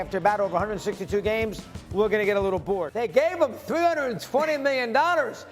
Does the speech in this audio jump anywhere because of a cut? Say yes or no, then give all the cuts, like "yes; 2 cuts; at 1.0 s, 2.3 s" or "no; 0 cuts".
yes; 1 cut; at 2.9 s